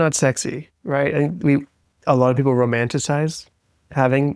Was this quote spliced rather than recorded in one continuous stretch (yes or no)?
no